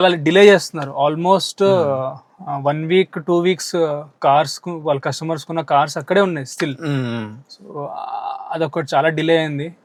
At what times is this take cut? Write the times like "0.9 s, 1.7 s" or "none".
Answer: none